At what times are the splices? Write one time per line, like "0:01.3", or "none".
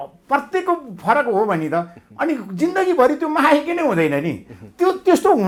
none